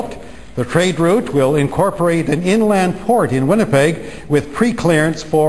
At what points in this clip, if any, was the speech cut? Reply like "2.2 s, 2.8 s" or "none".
none

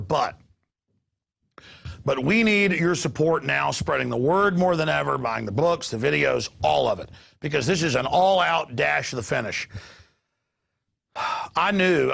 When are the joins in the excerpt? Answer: none

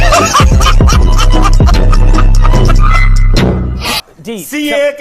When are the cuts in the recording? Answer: 3.9 s

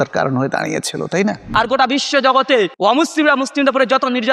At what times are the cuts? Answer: 1.4 s, 2.7 s

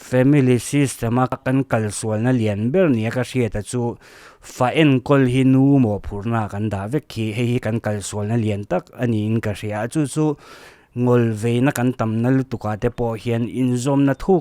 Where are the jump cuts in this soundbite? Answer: 1.4 s

